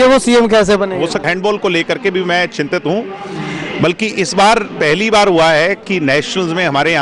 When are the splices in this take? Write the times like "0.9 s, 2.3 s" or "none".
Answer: 1.2 s